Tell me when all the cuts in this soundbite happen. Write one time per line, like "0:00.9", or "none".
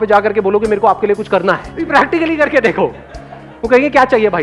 0:01.9